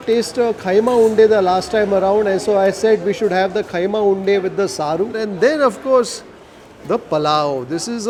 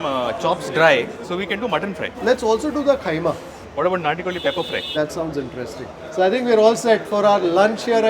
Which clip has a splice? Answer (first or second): second